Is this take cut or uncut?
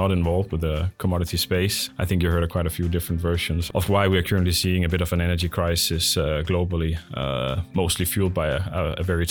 uncut